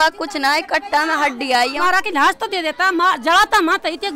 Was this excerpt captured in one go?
no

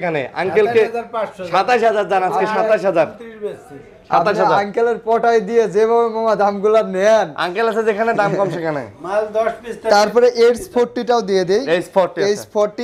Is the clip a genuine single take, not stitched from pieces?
yes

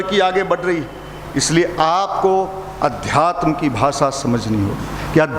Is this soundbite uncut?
yes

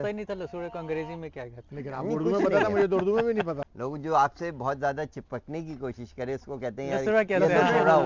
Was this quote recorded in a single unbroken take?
no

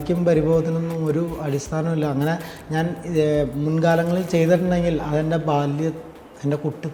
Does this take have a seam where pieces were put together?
no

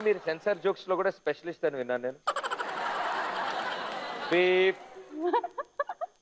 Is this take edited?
no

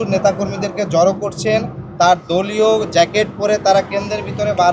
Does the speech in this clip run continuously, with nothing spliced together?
yes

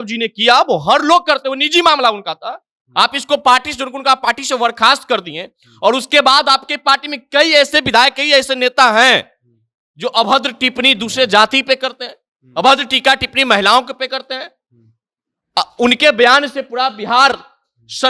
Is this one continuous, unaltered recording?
yes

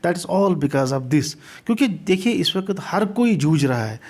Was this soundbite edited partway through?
no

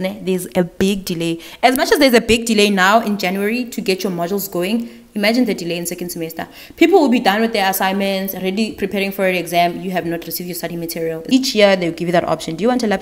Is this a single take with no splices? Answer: no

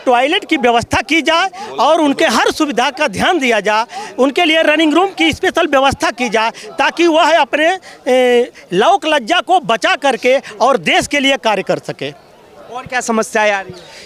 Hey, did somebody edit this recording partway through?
no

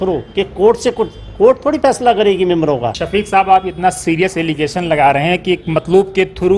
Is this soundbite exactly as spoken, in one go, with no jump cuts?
no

